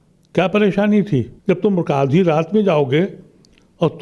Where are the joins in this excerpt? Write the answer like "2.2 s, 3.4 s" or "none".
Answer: 1.3 s